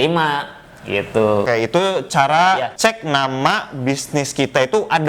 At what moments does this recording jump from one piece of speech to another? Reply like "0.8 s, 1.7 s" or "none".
1.5 s, 2.7 s